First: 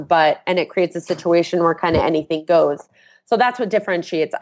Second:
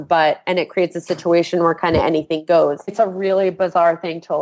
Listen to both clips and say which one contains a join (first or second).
second